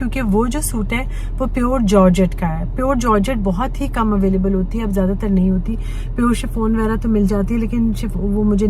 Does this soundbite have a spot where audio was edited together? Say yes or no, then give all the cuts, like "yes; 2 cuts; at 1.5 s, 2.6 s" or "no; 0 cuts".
no; 0 cuts